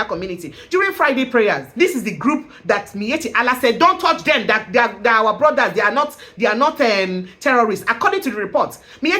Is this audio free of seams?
no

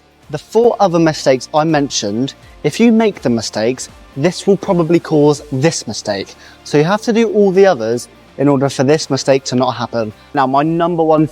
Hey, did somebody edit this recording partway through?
yes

